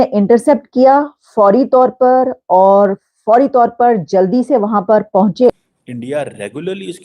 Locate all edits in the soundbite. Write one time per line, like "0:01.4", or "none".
0:05.6